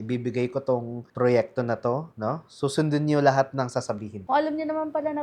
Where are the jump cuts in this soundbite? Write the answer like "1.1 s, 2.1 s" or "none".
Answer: 4.1 s